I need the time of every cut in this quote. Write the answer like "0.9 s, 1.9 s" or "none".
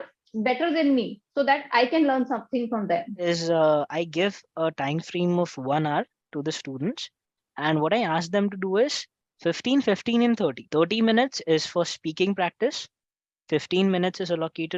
3.1 s, 10.6 s